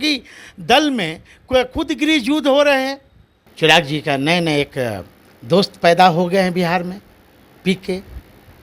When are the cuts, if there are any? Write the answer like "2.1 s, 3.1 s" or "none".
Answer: 3.4 s